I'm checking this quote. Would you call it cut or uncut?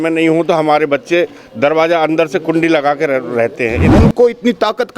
cut